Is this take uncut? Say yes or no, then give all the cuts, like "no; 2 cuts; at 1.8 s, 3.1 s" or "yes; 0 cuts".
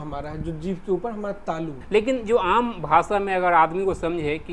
no; 1 cut; at 1.8 s